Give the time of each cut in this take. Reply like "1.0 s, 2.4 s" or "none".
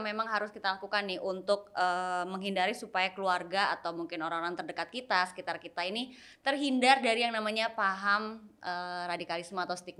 none